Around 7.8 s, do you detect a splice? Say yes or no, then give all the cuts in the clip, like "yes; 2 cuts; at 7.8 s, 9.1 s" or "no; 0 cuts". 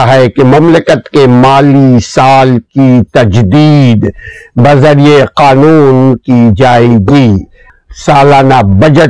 yes; 1 cut; at 7.8 s